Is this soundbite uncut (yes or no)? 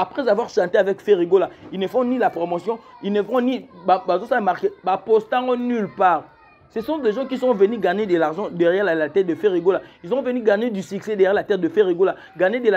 yes